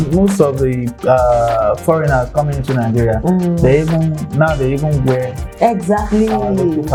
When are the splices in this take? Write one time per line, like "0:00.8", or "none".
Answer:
none